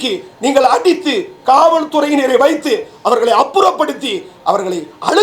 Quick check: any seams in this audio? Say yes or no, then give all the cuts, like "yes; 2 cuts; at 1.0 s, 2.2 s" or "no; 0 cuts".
no; 0 cuts